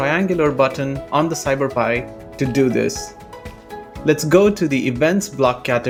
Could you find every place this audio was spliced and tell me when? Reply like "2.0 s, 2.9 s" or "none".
none